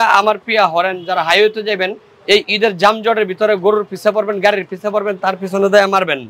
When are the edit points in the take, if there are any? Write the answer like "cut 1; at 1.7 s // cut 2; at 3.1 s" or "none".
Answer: none